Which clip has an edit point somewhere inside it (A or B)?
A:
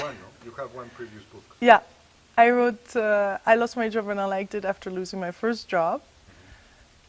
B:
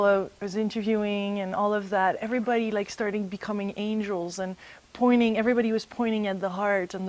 A